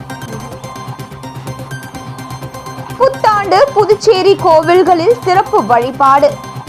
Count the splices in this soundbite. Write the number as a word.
one